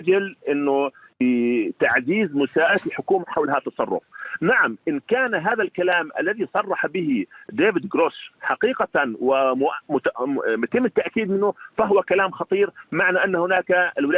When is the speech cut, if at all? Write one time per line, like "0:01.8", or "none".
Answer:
none